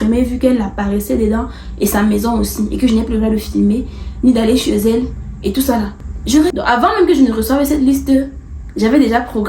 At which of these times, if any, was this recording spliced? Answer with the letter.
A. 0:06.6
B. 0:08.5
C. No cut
A